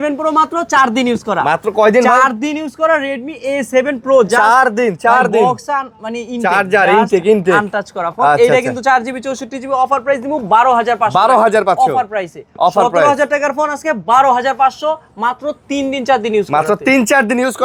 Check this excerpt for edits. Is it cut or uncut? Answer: uncut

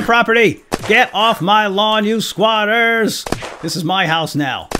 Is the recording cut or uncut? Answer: uncut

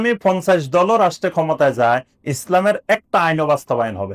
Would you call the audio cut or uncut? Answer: uncut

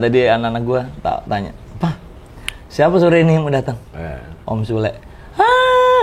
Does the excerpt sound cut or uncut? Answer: cut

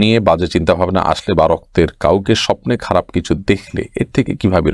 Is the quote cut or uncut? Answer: uncut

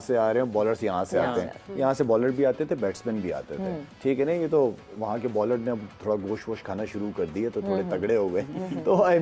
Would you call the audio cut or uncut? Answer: uncut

